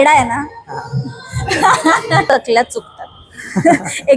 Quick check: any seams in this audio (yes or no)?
yes